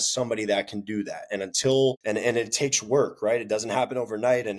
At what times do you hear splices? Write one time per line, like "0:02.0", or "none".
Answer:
0:02.0